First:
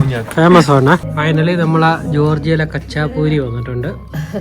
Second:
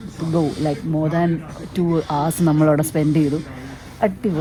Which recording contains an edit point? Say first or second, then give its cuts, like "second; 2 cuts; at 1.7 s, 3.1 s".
first; 1 cut; at 1.1 s